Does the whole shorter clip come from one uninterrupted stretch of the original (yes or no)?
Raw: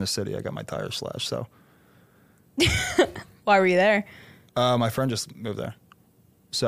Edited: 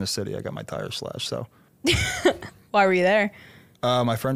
no